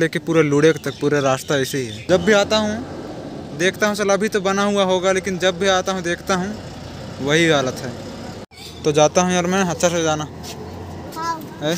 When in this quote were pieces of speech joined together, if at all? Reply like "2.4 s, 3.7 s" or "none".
2.0 s, 8.4 s

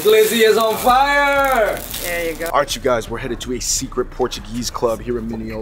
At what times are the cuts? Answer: 2.5 s

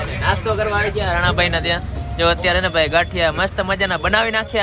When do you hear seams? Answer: none

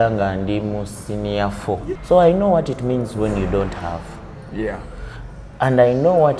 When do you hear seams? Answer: 2.0 s

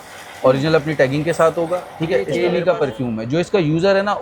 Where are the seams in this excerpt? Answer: 2.4 s

